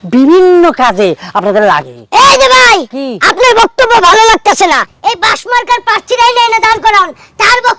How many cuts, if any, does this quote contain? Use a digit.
0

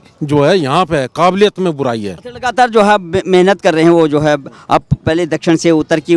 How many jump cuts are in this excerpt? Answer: 0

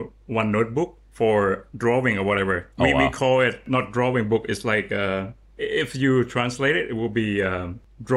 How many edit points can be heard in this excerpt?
1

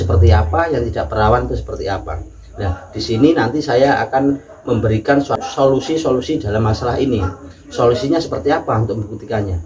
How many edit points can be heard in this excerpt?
1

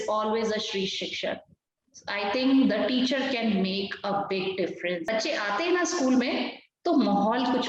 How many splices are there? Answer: 1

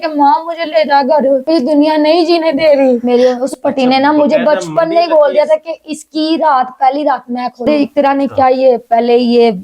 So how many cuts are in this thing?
2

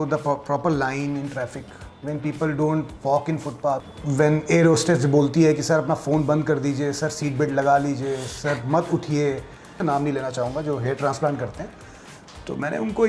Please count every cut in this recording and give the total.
2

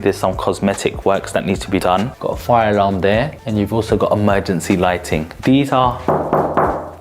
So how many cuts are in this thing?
3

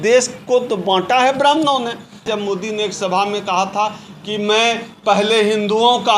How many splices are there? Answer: 1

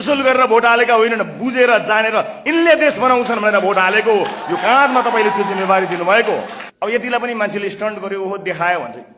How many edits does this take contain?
1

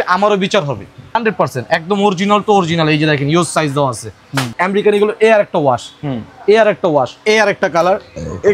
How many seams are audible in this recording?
3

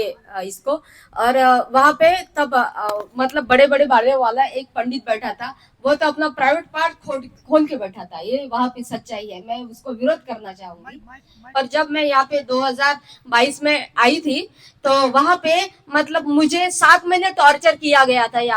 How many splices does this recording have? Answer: 1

